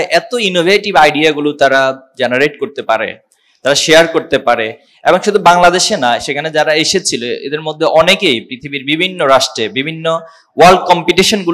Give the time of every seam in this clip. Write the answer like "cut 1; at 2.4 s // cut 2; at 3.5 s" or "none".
none